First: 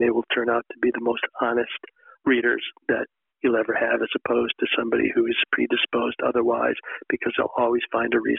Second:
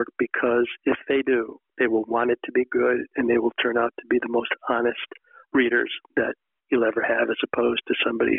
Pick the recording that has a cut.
second; 1 cut; at 1.6 s

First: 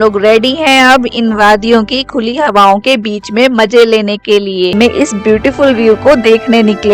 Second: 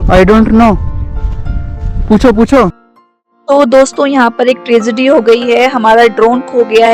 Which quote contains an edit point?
first; 1 cut; at 4.7 s

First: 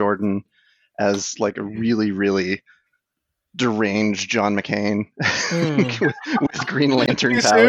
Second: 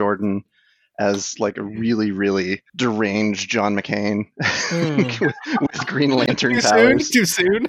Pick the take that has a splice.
second; 1 cut; at 2.7 s

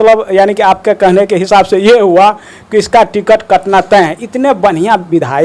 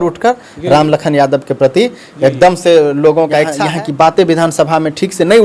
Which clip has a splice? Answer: second; 1 cut; at 3.6 s

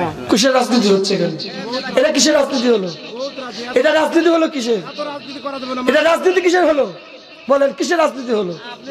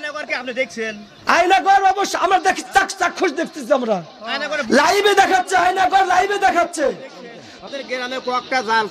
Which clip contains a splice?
second; 1 cut; at 7.6 s

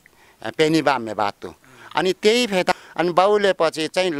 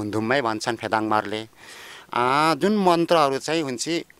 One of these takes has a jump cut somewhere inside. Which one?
first; 1 cut; at 2.7 s

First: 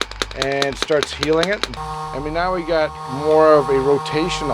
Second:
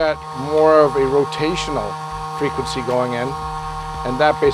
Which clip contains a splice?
first; 1 cut; at 1.7 s

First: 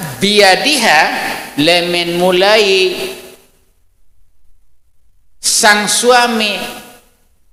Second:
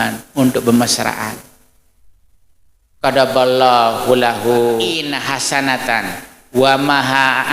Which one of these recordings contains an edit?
second; 1 cut; at 5.1 s

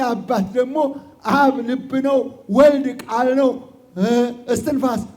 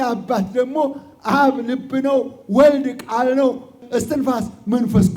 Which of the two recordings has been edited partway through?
second; 1 cut; at 3.8 s

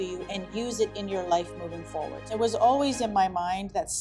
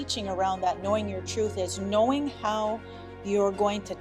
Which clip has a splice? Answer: first; 1 cut; at 2.3 s

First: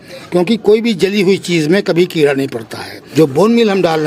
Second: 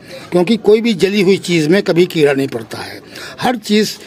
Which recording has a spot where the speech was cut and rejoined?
first; 1 cut; at 3.1 s

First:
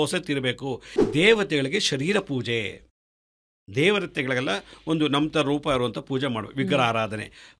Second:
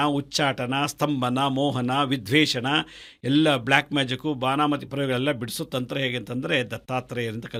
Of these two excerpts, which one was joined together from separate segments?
first; 1 cut; at 0.9 s

